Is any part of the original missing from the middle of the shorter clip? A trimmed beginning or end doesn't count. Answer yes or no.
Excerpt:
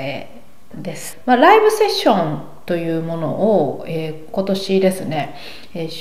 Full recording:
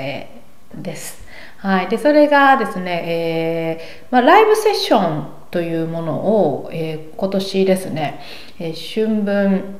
yes